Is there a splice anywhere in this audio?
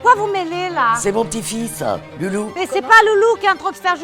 yes; 1 cut; at 2.5 s

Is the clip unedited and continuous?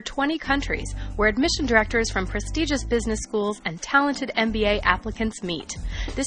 yes; 0 cuts

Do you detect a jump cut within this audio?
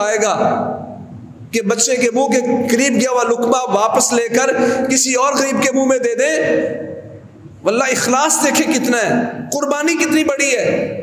no; 0 cuts

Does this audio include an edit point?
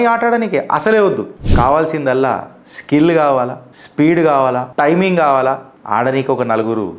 no; 0 cuts

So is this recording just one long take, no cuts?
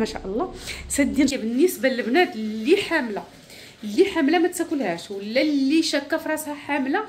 no; 1 cut; at 1.3 s

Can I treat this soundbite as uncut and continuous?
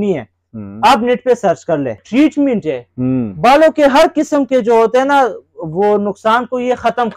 no; 1 cut; at 2.0 s

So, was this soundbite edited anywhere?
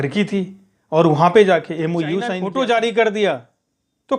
yes; 1 cut; at 2.4 s

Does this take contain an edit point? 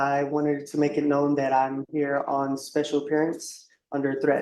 no; 0 cuts

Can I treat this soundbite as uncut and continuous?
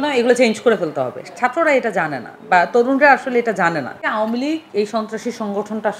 no; 1 cut; at 4.0 s

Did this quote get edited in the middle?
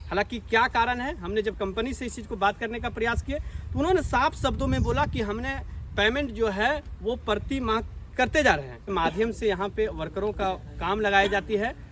yes; 1 cut; at 8.9 s

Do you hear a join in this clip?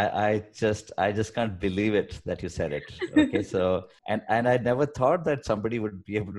yes; 1 cut; at 3.9 s

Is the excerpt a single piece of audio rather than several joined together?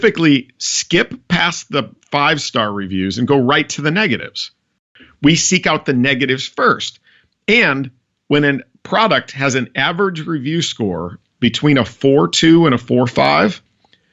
no; 1 cut; at 4.9 s

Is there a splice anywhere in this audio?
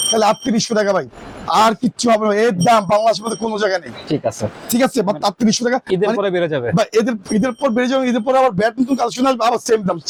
no; 0 cuts

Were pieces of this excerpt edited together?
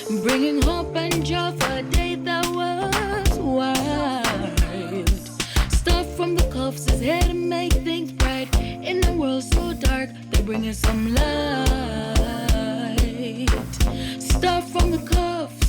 no; 0 cuts

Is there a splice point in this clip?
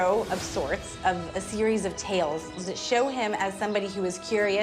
yes; 2 cuts; at 0.9 s, 2.6 s

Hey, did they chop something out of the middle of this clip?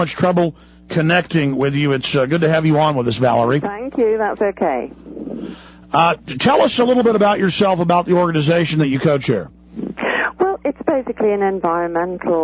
no; 0 cuts

